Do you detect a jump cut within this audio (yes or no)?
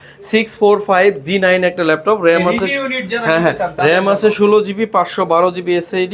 no